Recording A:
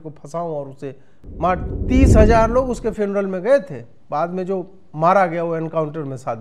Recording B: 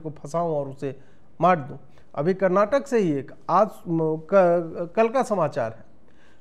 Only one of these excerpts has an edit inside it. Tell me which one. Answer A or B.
A